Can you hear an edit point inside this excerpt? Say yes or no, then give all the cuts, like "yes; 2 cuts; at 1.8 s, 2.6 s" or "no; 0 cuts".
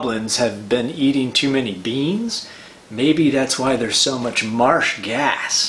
no; 0 cuts